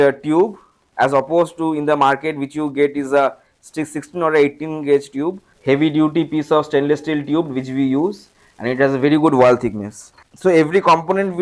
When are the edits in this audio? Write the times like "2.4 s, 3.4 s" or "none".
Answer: 5.5 s, 10.2 s